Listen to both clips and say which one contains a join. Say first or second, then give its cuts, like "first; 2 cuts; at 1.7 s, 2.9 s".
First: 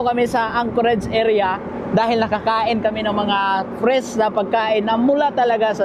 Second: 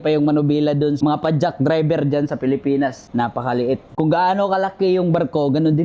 second; 3 cuts; at 1.0 s, 3.0 s, 3.9 s